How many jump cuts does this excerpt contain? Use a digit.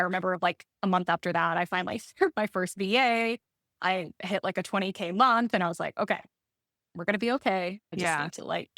1